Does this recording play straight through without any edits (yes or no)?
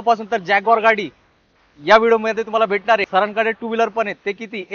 no